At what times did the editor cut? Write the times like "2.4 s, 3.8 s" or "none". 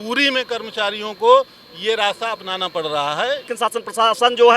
3.5 s